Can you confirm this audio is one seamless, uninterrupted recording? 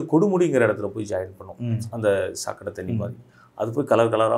yes; 0 cuts

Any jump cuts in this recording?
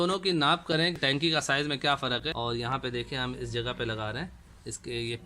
yes; 2 cuts; at 1.0 s, 2.3 s

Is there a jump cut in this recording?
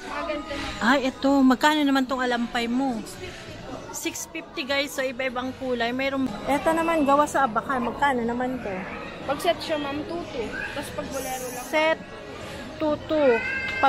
yes; 1 cut; at 6.3 s

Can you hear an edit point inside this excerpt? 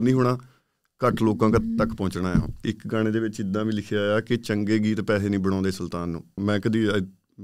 yes; 2 cuts; at 2.7 s, 6.4 s

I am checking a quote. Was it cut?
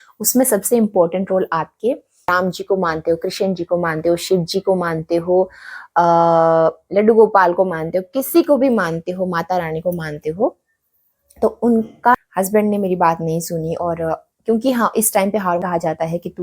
yes; 3 cuts; at 2.3 s, 12.2 s, 15.6 s

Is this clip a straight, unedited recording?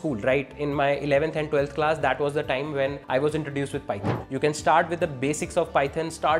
no; 2 cuts; at 3.0 s, 4.2 s

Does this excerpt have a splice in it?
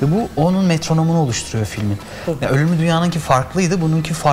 no; 0 cuts

